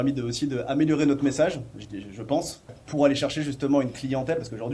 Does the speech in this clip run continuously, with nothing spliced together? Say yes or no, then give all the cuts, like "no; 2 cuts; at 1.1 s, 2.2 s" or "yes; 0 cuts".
yes; 0 cuts